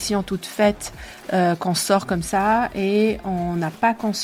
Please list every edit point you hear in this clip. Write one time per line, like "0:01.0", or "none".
none